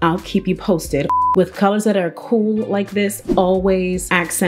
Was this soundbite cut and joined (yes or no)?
yes